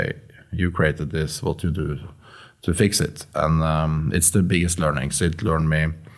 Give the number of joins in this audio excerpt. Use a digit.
0